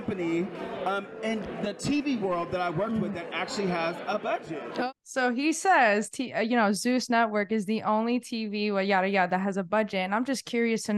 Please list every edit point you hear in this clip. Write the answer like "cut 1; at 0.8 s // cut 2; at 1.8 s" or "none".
cut 1; at 4.9 s